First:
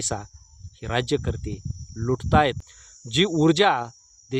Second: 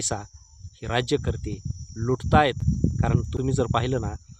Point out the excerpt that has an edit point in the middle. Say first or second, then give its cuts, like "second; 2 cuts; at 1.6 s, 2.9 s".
first; 1 cut; at 2.6 s